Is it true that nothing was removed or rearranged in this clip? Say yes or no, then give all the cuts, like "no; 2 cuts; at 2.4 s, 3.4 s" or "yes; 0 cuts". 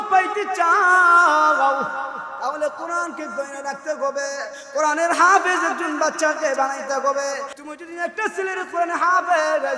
no; 1 cut; at 7.5 s